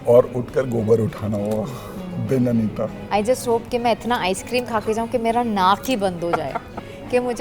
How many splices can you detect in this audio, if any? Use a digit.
1